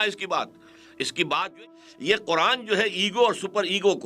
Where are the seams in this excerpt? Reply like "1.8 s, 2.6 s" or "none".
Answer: 1.6 s

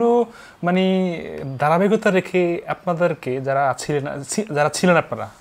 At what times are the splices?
none

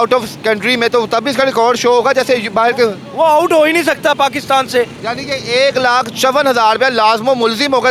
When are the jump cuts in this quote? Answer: none

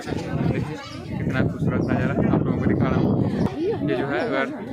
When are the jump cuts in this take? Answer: 3.5 s

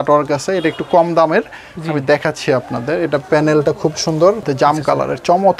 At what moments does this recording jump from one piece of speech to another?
4.5 s

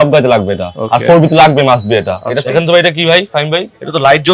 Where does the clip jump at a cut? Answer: 2.3 s

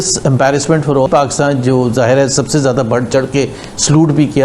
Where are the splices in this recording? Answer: 1.1 s

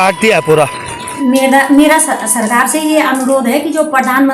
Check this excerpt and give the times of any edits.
1.2 s

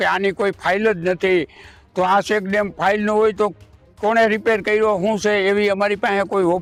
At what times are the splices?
none

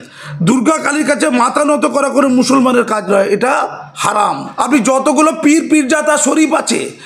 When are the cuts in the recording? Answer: 4.5 s

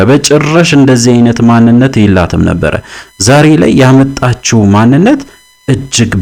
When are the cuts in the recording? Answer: none

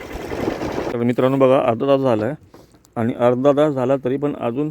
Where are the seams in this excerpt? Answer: 0.9 s

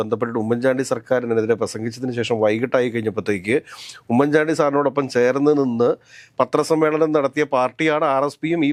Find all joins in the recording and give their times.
none

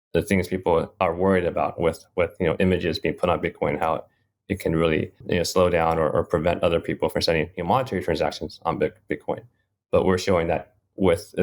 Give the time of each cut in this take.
1.0 s, 5.2 s

